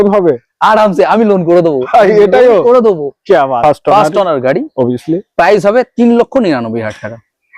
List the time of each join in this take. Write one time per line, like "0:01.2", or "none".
0:03.6